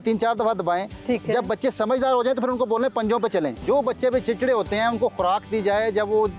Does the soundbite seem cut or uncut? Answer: cut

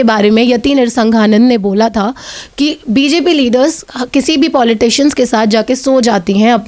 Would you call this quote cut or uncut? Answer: uncut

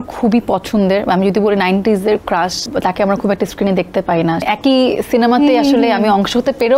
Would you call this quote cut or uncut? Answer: cut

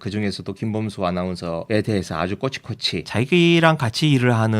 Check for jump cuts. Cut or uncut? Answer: cut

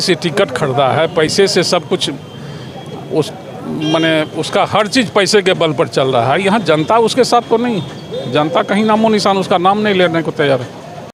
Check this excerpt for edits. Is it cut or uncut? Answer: uncut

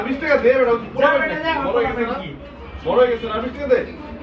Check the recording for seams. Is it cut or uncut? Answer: uncut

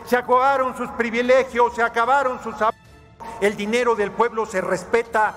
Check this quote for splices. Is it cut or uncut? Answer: uncut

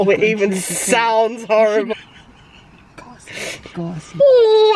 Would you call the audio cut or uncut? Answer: uncut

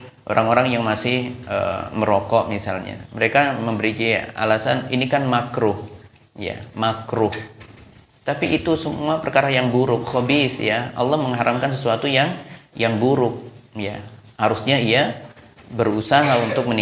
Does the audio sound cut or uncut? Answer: uncut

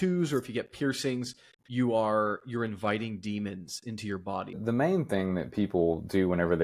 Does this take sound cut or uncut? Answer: cut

